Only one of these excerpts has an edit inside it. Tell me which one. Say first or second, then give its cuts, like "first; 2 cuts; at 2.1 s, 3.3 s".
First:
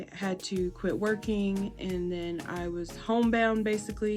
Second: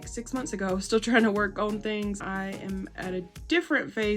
second; 1 cut; at 2.2 s